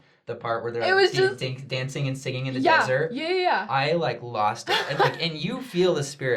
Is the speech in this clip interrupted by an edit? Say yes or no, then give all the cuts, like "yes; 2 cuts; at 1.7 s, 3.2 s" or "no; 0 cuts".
yes; 1 cut; at 4.9 s